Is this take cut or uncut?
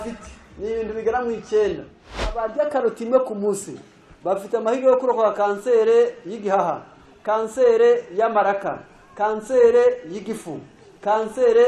cut